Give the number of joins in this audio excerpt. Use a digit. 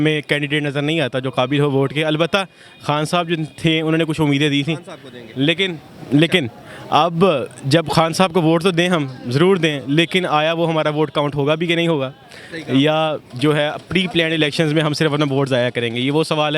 0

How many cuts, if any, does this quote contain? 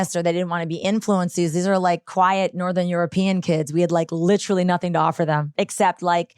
1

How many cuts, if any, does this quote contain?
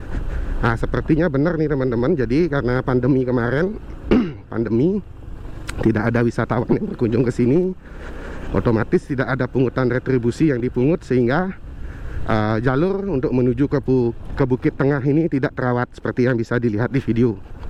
0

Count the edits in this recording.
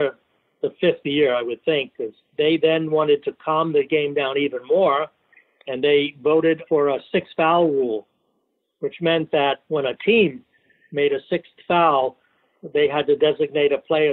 3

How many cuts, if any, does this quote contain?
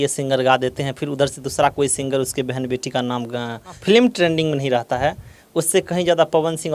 1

